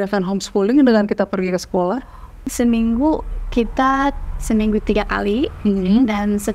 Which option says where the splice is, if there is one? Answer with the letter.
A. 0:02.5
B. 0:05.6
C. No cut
A